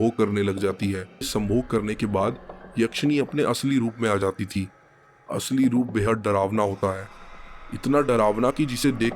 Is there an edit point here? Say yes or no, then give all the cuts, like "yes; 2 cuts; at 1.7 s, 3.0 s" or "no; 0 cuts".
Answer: yes; 1 cut; at 1.3 s